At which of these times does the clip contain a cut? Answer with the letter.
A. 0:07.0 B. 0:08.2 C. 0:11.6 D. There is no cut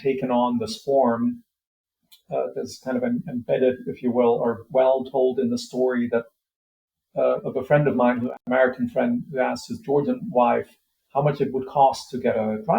B